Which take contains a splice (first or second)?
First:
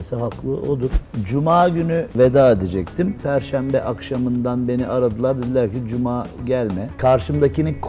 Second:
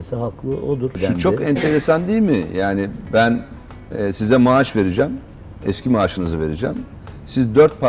first